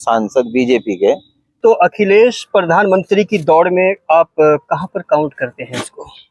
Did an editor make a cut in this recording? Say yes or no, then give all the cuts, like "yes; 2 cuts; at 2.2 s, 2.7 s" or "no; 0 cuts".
yes; 1 cut; at 1.6 s